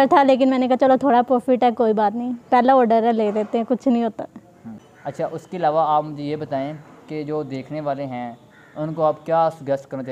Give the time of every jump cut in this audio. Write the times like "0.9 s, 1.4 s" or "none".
none